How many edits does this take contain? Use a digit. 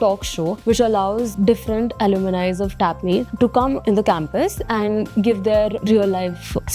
1